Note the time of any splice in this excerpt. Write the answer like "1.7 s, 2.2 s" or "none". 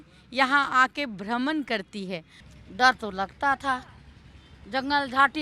none